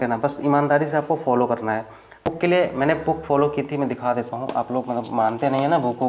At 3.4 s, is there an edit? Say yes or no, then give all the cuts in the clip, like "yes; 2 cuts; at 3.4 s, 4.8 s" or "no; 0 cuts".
no; 1 cut; at 2.0 s